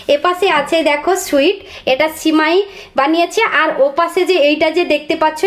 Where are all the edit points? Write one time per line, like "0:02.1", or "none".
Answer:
none